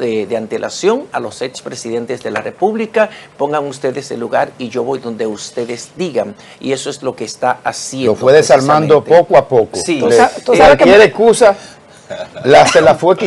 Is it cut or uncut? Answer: uncut